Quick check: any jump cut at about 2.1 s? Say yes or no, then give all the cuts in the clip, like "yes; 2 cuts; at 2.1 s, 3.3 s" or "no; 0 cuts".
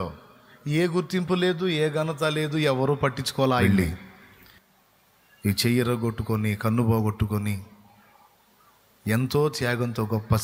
no; 1 cut; at 3.6 s